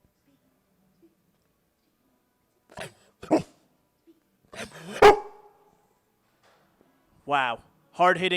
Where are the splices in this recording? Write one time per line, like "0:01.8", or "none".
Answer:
none

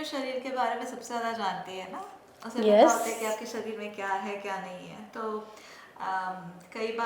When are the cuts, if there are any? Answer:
none

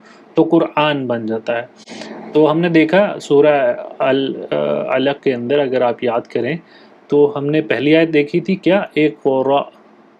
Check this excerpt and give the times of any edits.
none

